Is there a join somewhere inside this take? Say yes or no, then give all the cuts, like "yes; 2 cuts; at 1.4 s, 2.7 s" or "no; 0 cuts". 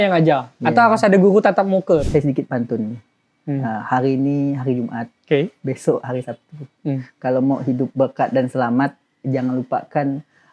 yes; 1 cut; at 2.0 s